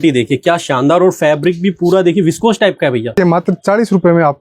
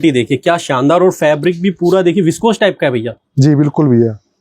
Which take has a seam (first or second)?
first